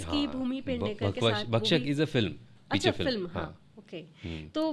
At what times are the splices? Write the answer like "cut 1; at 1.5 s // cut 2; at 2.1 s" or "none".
none